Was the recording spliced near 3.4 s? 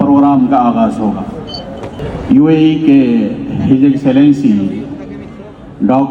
no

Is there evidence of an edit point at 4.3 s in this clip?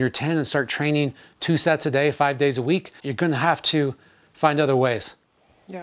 no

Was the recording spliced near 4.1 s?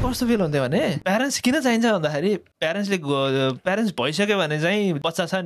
no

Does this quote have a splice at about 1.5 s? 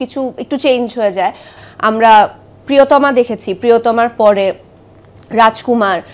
yes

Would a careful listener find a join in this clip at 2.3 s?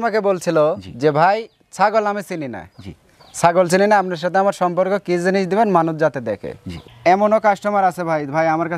no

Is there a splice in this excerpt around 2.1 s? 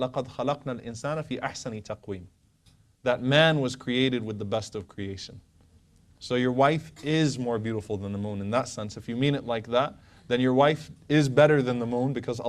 no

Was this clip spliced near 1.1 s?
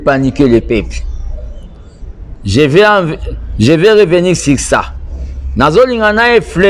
no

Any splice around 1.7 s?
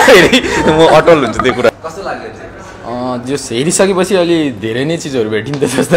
yes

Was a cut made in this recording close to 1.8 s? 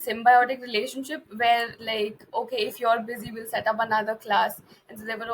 yes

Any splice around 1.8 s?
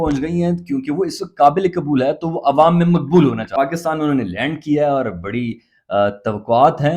no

